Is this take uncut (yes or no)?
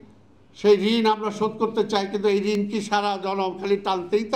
yes